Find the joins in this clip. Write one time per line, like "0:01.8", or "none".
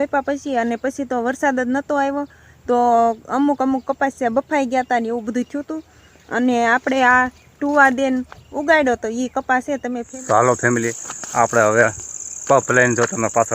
0:10.1